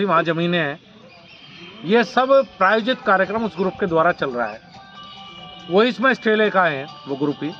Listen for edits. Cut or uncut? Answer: uncut